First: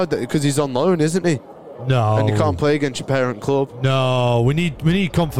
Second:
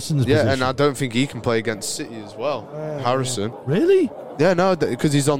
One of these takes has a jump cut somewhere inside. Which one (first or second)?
second